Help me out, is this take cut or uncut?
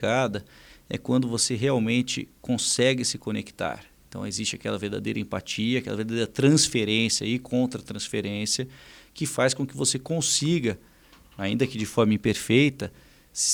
uncut